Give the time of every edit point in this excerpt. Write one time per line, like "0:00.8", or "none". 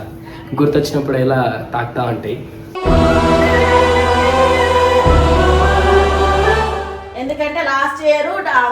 0:07.0

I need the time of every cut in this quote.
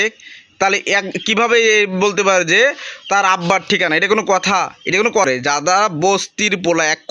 0:05.3

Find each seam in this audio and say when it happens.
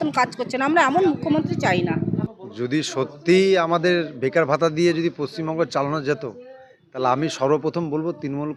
none

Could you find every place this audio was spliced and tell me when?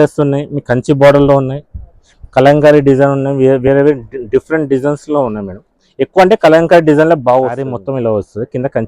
0:07.7

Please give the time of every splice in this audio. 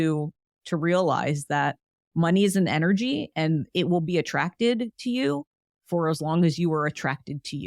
none

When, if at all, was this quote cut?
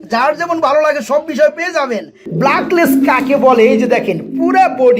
0:02.2

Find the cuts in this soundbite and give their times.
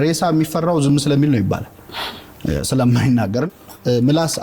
0:03.4

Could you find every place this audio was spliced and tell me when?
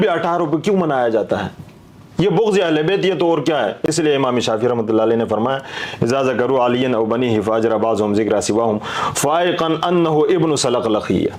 none

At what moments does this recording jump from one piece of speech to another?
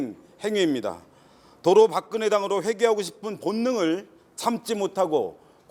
none

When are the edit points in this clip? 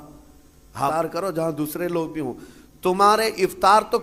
0:00.9

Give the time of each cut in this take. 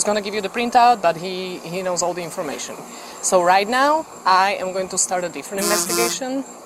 0:02.9

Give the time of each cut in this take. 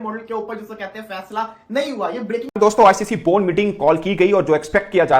0:02.5

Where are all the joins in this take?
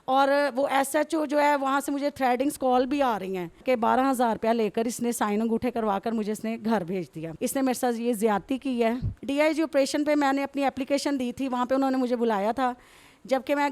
0:03.6
0:07.2
0:09.2

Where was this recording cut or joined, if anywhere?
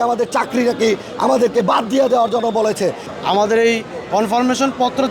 0:03.1

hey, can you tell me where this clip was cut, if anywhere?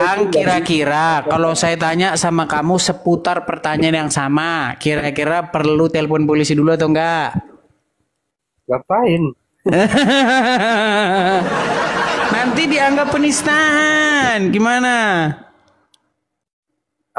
none

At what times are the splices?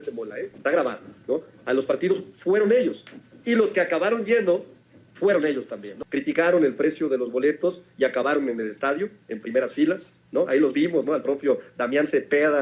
0:06.0

